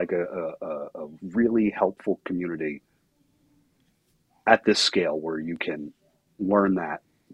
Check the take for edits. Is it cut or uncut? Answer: uncut